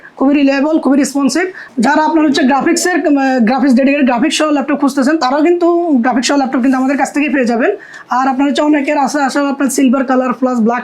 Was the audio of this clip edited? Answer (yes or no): yes